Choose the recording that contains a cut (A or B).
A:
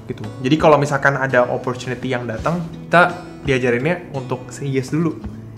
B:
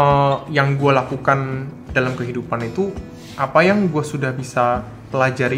A